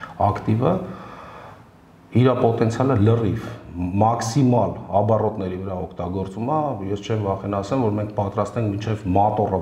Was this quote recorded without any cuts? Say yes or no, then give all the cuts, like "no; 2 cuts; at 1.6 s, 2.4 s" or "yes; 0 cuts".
yes; 0 cuts